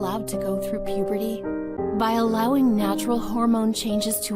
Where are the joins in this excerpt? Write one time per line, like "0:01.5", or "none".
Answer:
0:01.5